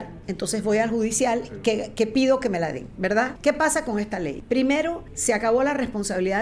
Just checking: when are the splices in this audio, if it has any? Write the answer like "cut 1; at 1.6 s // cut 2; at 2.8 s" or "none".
cut 1; at 3.3 s // cut 2; at 4.4 s // cut 3; at 5.1 s